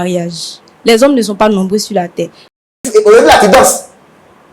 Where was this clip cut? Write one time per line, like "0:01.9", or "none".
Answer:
0:02.7